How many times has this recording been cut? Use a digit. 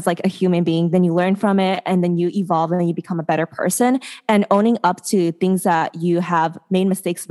0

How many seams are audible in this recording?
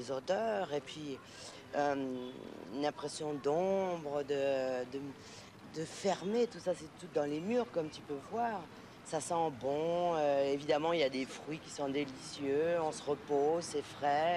1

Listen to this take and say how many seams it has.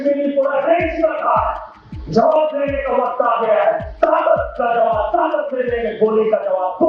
0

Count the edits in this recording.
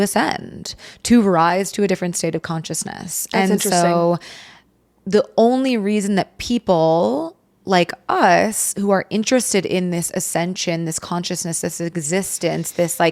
0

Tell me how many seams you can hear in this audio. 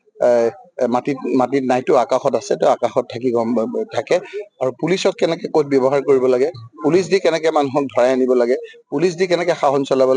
0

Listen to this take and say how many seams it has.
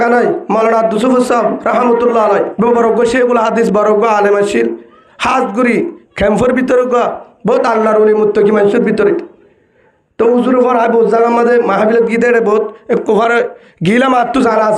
1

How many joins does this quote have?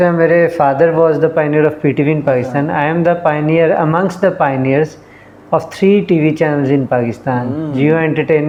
0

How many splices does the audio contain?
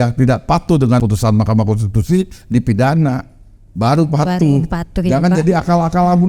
1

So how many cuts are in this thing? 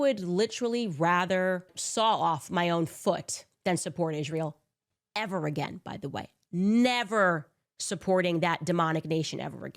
1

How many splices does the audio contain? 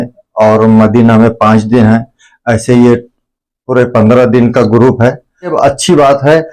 1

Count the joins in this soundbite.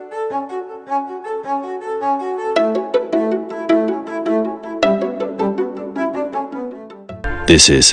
1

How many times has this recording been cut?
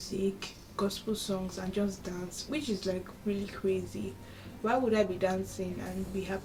0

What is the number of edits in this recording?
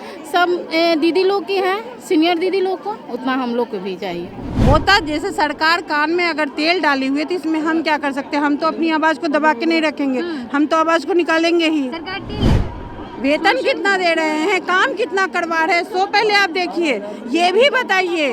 2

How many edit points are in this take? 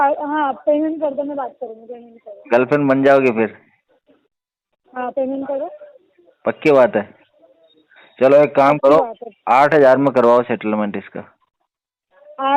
0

